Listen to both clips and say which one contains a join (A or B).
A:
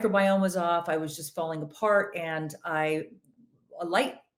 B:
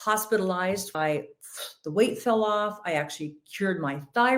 B